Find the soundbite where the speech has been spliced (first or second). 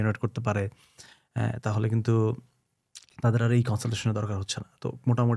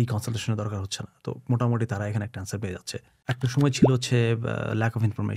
second